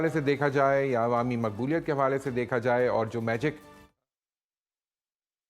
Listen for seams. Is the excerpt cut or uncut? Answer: uncut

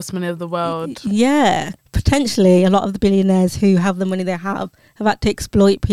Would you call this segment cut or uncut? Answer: cut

